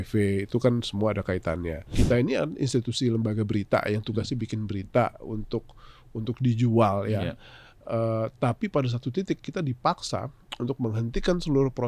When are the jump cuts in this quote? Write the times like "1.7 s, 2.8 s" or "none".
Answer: 1.8 s

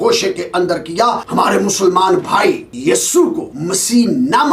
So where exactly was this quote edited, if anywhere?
1.2 s, 2.7 s, 3.5 s

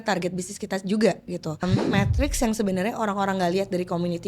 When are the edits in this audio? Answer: 1.6 s

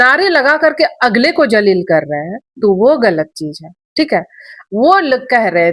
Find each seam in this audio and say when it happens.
none

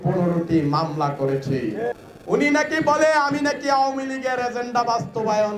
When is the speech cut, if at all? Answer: 2.1 s

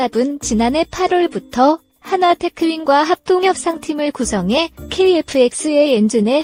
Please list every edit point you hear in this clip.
none

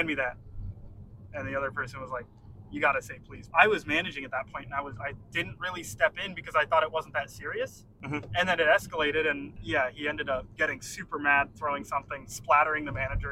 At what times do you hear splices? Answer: 3.4 s, 5.2 s, 7.9 s, 9.5 s, 10.5 s

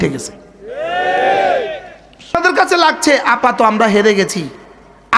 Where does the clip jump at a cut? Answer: 2.4 s

